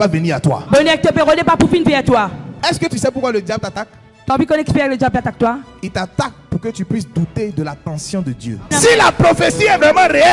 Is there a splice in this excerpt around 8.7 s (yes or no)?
yes